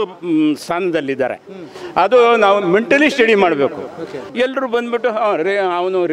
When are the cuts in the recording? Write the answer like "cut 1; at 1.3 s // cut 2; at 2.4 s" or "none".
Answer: cut 1; at 4.2 s